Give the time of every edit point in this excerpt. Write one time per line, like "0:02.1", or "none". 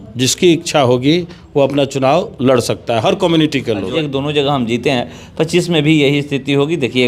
0:03.9